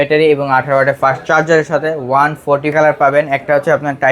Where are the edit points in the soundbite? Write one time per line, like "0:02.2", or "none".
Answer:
0:02.7